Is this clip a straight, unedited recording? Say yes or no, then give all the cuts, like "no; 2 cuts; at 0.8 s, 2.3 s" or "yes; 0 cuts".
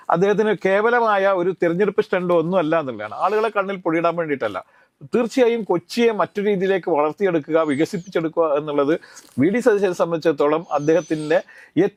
yes; 0 cuts